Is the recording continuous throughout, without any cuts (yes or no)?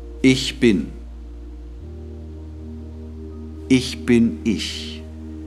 yes